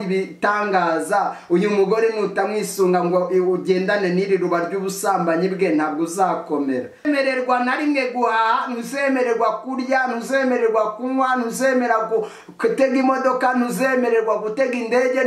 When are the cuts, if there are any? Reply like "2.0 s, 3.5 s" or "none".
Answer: 6.9 s